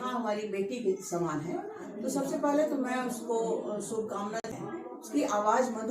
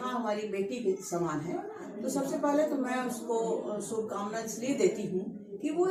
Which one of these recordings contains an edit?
first; 1 cut; at 4.5 s

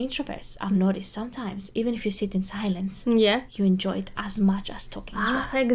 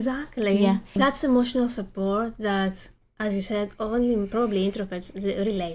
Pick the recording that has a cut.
second; 1 cut; at 0.9 s

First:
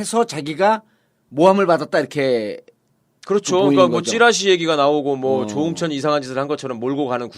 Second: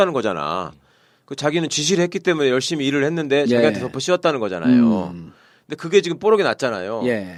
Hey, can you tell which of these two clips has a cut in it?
first; 1 cut; at 4.4 s

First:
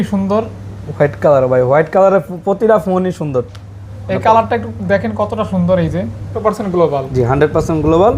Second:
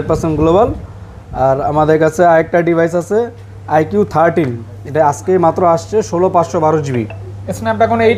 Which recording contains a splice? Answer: first; 1 cut; at 6.3 s

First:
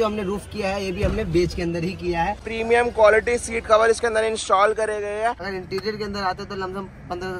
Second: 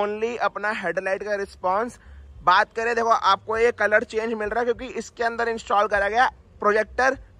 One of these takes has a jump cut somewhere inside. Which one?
first; 2 cuts; at 2.5 s, 5.5 s

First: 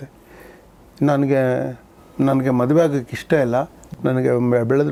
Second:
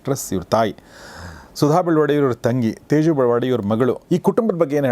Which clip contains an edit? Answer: second; 1 cut; at 4.0 s

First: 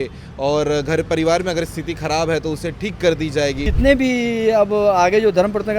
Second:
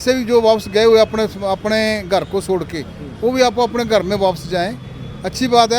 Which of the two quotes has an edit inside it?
first; 1 cut; at 3.7 s

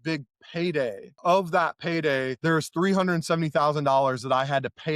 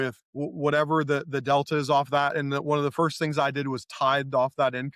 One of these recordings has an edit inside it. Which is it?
first; 2 cuts; at 1.1 s, 2.3 s

